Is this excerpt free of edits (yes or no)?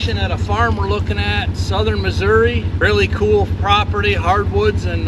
no